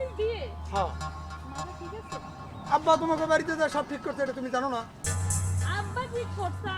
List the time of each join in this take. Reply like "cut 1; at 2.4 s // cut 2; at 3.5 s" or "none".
none